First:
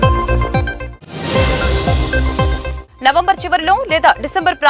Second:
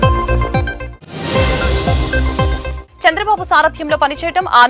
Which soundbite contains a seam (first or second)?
second